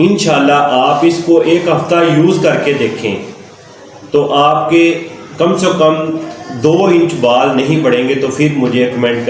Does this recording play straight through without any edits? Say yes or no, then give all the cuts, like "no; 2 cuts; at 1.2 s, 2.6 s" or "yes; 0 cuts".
yes; 0 cuts